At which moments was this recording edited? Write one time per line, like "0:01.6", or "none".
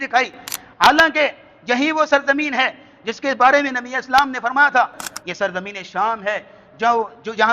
0:05.0

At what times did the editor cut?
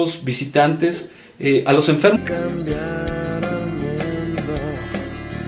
none

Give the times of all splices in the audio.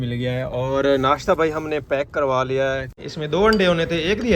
0:03.0

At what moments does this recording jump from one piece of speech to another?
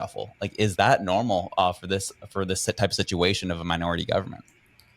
none

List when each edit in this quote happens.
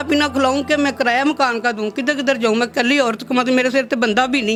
none

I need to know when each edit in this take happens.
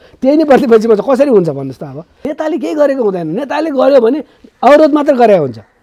0:02.3

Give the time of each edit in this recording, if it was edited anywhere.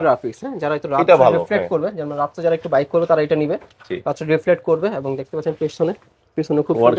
none

